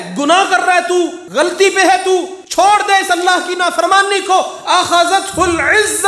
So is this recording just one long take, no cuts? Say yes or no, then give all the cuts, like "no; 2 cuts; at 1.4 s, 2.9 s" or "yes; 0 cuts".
yes; 0 cuts